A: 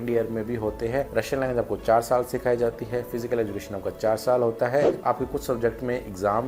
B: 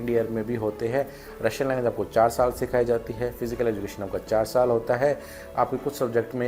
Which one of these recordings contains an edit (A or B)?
A